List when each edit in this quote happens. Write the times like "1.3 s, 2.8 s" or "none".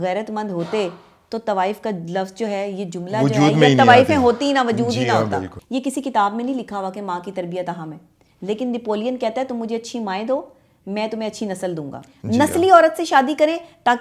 5.6 s, 12.1 s